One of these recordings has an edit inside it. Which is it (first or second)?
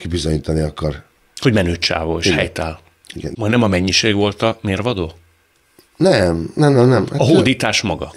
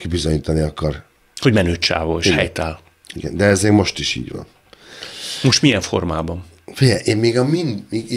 first